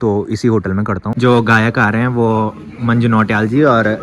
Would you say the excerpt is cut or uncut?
cut